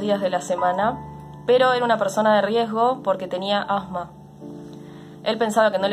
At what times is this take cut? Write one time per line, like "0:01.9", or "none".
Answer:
none